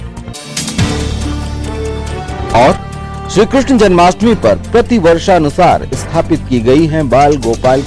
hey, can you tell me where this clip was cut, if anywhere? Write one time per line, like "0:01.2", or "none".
0:02.5